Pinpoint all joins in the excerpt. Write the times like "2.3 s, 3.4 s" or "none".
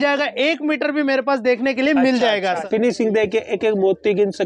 2.7 s